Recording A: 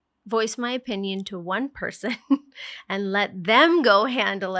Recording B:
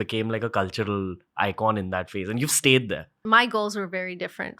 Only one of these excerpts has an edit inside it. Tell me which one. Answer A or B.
B